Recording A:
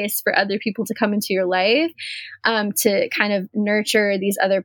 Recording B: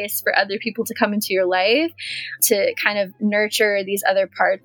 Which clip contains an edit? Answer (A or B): B